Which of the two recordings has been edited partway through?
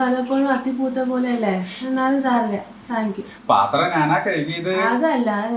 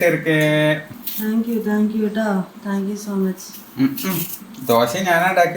second; 1 cut; at 0.9 s

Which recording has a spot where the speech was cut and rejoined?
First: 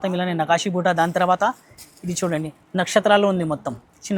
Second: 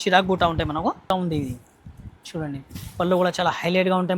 second; 1 cut; at 1.1 s

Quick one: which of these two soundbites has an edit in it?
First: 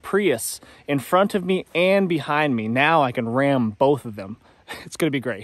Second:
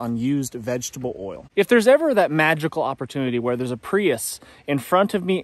second; 1 cut; at 1.4 s

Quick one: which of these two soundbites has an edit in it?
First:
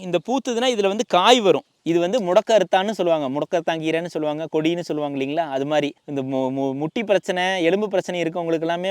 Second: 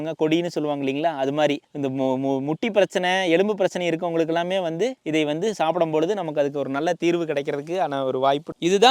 first; 1 cut; at 1.7 s

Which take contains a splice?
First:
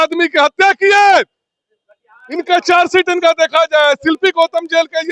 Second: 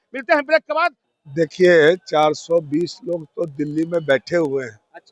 second; 1 cut; at 1.0 s

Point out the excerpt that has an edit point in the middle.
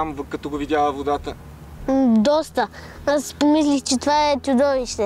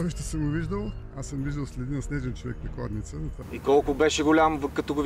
second; 2 cuts; at 1.1 s, 3.4 s

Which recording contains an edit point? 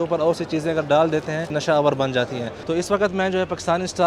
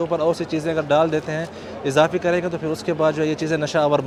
first; 2 cuts; at 1.6 s, 2.6 s

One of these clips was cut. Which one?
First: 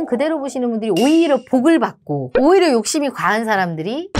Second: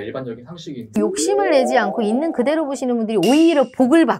second; 1 cut; at 0.9 s

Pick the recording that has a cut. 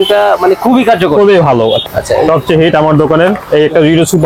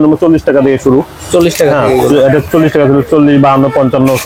first; 1 cut; at 1.8 s

